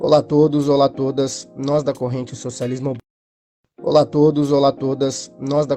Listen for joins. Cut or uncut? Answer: cut